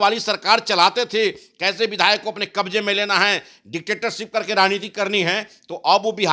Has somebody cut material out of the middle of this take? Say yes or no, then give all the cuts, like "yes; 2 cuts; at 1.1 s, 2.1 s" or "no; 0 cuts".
no; 0 cuts